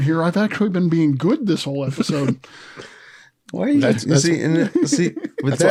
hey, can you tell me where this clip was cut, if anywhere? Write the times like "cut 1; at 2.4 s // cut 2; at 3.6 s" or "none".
none